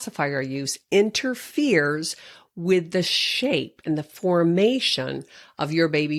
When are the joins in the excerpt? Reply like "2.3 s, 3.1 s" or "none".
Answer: none